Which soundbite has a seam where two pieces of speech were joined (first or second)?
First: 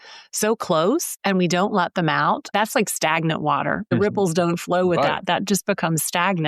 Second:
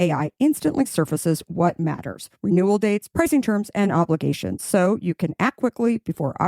first